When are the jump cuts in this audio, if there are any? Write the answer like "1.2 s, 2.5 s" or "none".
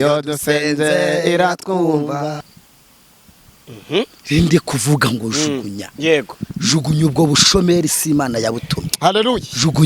2.6 s